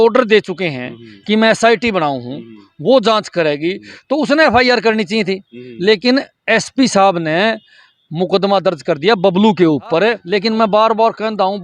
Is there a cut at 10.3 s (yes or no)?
yes